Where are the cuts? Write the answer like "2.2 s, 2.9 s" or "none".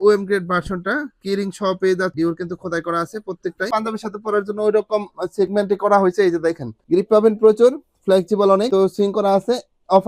2.1 s, 3.7 s